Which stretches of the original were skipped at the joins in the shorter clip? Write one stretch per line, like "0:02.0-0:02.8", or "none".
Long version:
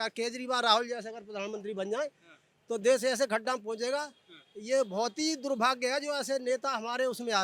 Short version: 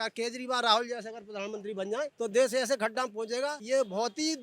0:02.1-0:02.6
0:04.1-0:04.6